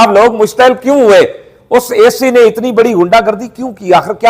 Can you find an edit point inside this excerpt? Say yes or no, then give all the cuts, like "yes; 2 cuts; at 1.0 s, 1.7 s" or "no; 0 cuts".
no; 0 cuts